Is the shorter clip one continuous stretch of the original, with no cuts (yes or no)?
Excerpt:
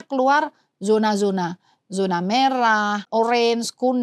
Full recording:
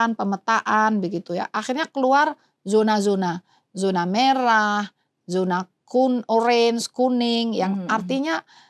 no